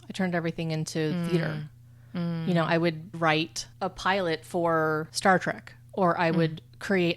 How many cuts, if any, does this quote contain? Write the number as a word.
two